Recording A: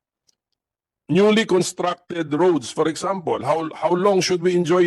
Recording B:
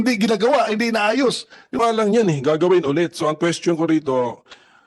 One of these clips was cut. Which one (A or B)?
B